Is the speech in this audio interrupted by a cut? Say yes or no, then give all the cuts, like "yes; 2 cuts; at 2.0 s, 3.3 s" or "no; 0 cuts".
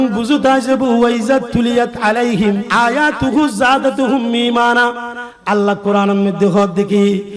yes; 1 cut; at 2.7 s